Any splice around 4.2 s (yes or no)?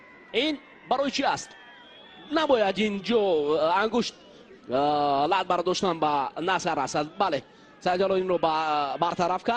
yes